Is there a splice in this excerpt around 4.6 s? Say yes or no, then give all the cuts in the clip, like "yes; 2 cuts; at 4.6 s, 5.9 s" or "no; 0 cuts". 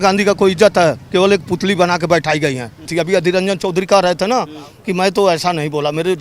no; 1 cut; at 2.8 s